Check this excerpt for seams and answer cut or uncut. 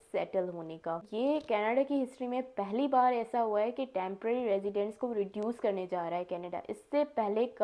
cut